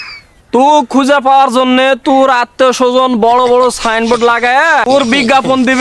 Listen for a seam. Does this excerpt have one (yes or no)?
yes